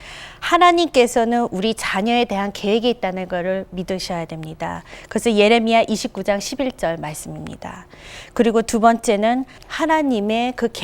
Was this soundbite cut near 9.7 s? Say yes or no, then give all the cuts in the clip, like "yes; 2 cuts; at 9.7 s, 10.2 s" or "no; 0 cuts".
yes; 1 cut; at 9.7 s